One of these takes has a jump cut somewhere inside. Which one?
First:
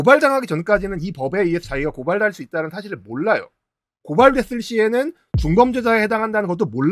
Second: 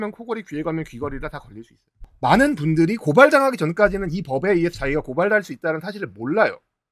second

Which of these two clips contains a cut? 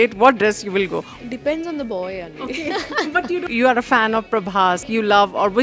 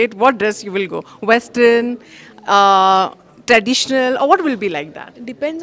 first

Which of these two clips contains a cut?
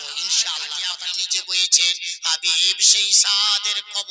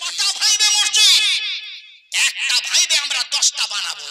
first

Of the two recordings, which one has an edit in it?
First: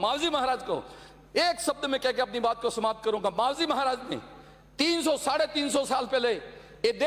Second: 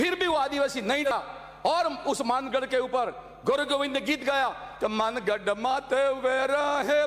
second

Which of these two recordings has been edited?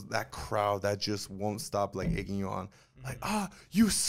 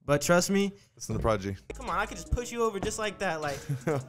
second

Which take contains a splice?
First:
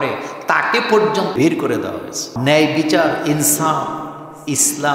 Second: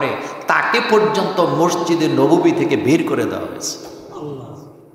first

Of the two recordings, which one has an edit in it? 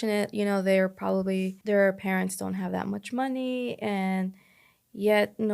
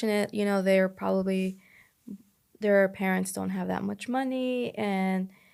first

